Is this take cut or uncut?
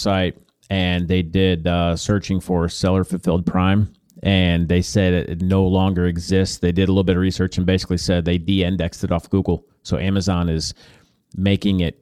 uncut